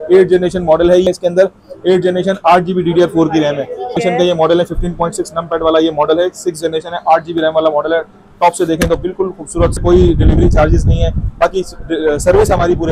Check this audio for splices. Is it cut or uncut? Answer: cut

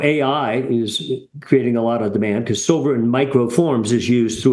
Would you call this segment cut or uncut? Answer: uncut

